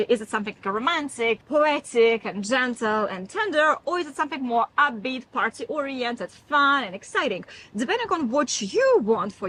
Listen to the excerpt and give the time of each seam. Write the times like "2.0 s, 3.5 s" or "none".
none